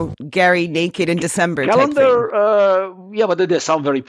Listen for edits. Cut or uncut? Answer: uncut